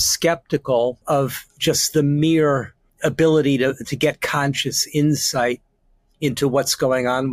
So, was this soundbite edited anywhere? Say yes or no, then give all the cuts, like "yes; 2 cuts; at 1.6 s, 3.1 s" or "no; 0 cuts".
yes; 2 cuts; at 1.0 s, 2.9 s